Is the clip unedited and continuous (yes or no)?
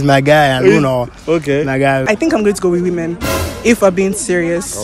no